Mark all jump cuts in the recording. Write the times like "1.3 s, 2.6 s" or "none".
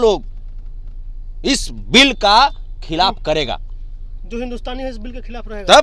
none